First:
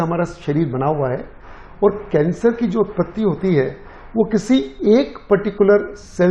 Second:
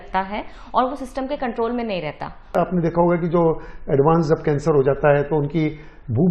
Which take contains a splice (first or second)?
second